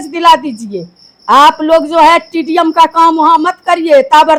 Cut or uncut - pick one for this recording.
uncut